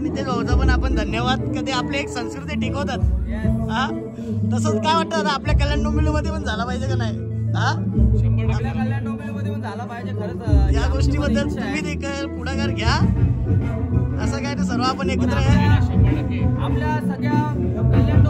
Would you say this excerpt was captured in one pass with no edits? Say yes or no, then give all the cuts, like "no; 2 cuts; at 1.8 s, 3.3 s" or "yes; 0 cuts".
yes; 0 cuts